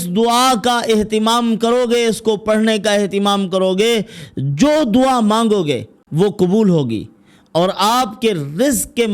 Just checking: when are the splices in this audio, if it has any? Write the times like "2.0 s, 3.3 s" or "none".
6.0 s